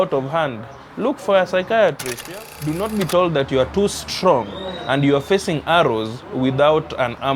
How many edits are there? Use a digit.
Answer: 1